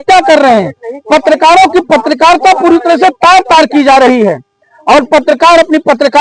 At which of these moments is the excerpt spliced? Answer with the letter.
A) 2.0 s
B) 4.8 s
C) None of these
C